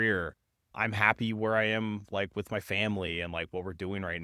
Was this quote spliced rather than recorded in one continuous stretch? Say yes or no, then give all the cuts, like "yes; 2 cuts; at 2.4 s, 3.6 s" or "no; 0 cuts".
no; 0 cuts